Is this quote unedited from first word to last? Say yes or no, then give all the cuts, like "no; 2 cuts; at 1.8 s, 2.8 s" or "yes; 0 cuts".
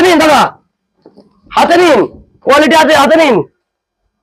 yes; 0 cuts